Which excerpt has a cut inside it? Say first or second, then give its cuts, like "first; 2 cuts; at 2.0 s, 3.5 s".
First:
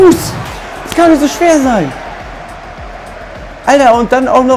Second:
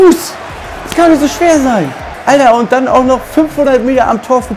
second; 1 cut; at 2.0 s